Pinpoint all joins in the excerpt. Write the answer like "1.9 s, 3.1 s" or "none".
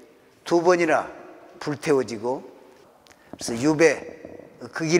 3.3 s

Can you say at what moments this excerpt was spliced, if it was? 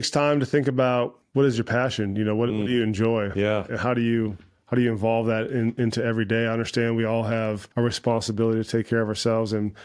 1.2 s, 7.6 s

